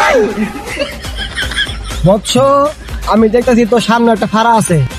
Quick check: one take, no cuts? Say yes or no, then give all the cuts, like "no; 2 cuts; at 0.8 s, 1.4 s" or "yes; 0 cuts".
no; 1 cut; at 1.7 s